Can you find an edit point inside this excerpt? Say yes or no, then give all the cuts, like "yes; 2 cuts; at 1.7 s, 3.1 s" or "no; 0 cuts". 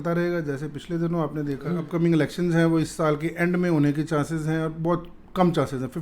yes; 1 cut; at 1.9 s